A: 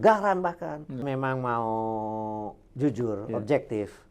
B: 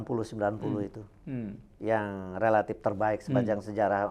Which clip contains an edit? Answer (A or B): A